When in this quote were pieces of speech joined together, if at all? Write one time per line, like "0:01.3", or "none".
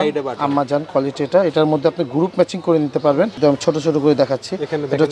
0:03.3